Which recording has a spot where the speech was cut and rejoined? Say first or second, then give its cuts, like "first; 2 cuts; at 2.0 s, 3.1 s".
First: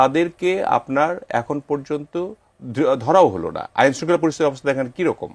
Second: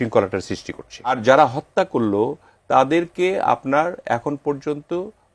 second; 1 cut; at 1.1 s